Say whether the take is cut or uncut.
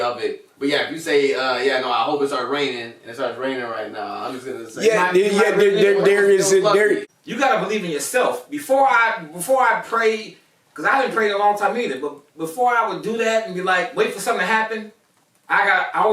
cut